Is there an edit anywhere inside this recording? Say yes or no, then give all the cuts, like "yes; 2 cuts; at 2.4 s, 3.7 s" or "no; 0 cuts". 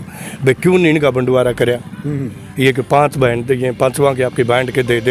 no; 0 cuts